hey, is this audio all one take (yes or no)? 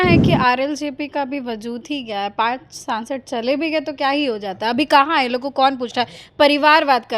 yes